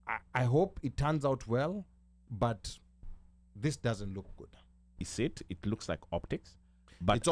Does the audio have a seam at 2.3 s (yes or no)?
no